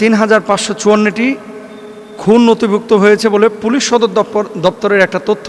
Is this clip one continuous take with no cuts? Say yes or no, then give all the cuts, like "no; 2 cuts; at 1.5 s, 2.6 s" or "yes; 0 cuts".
yes; 0 cuts